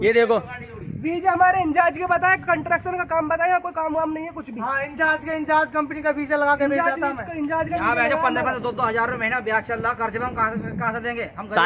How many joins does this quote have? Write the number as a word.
zero